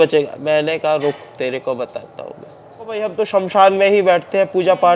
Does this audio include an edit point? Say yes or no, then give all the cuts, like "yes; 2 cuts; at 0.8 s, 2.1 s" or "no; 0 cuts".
yes; 1 cut; at 3.0 s